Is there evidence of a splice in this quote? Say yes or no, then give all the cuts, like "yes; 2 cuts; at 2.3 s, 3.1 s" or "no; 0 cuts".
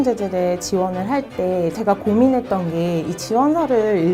yes; 1 cut; at 1.8 s